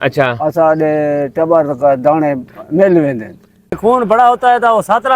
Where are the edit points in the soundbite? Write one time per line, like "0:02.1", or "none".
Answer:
0:03.8